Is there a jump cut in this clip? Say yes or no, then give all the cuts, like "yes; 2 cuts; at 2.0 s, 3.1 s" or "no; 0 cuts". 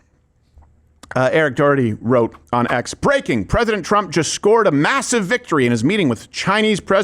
no; 0 cuts